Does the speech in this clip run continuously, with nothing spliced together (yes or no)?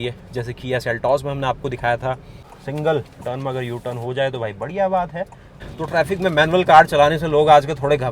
no